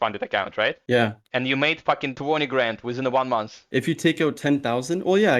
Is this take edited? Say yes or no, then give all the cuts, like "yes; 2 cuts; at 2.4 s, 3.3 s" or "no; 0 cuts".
yes; 3 cuts; at 0.8 s, 2.1 s, 3.6 s